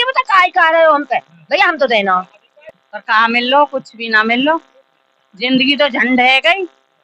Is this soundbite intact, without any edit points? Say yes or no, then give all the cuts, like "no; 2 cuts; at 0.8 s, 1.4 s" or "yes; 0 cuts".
no; 1 cut; at 2.3 s